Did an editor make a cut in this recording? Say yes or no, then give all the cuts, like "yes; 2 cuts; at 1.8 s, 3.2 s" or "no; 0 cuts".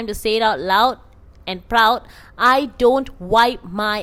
no; 0 cuts